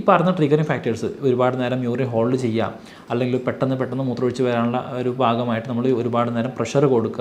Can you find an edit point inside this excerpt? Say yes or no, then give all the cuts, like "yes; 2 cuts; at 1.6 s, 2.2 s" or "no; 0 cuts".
no; 0 cuts